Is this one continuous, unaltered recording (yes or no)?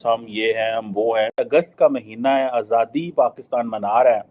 no